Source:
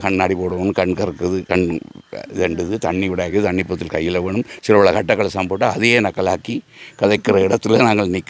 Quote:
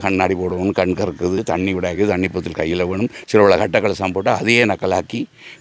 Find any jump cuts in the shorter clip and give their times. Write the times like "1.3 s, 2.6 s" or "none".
1.4 s

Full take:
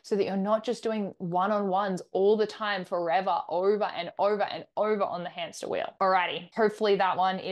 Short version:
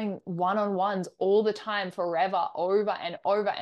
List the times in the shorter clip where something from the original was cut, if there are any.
none

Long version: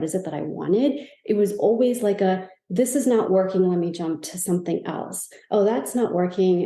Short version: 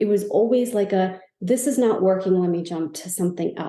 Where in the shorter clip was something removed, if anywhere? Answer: none

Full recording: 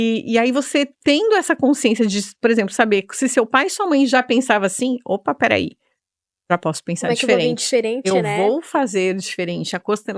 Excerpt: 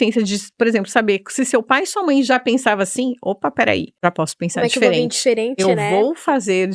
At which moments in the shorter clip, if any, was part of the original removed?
3.9 s

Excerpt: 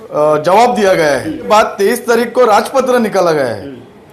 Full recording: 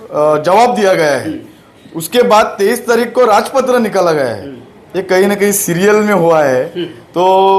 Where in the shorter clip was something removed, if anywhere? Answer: 1.5 s

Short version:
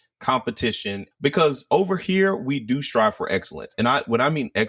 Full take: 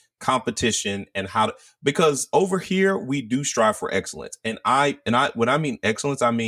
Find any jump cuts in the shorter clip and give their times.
1.1 s, 3.7 s

